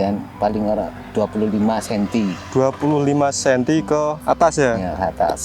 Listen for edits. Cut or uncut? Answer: uncut